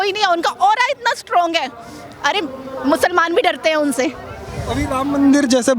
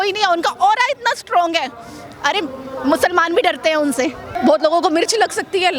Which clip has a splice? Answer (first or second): second